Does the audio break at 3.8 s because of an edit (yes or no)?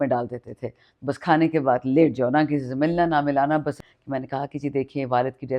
yes